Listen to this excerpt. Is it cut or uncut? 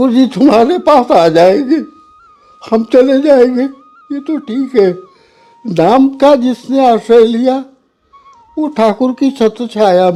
uncut